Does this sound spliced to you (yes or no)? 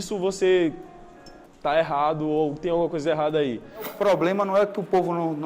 yes